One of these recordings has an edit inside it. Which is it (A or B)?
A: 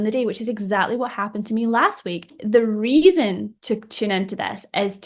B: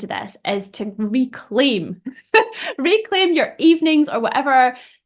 A